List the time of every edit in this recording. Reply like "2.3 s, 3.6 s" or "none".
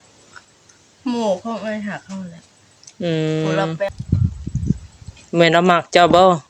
3.9 s